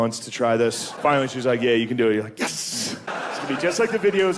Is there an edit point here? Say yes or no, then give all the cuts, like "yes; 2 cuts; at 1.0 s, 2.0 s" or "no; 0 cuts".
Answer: yes; 2 cuts; at 0.9 s, 3.1 s